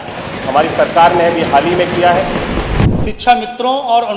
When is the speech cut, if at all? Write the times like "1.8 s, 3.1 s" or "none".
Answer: 2.9 s